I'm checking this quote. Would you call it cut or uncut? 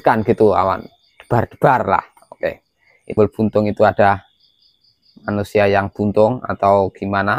cut